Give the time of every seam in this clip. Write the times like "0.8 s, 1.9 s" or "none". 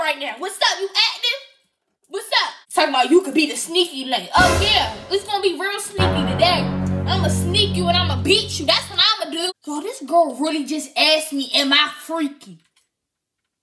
2.6 s, 9.5 s